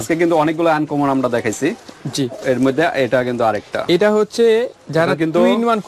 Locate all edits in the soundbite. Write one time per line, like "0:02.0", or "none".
none

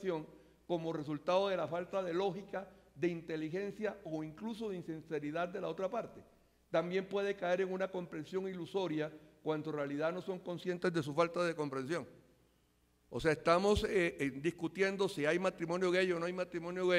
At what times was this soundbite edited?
0:01.3

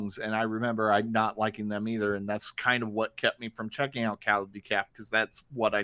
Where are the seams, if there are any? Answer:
none

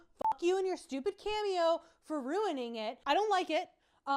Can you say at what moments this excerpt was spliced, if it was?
0:02.9

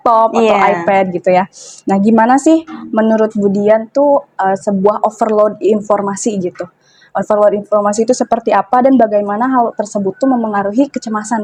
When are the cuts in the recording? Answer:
none

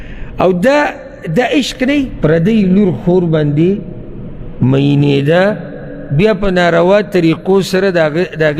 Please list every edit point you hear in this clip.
0:02.1

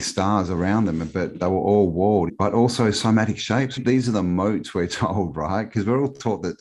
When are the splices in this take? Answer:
0:02.3
0:03.8

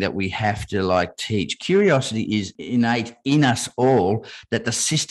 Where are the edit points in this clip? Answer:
0:02.5

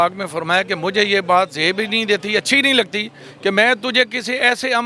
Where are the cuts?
none

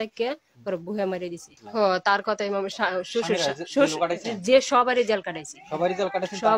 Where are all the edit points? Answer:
0:01.6

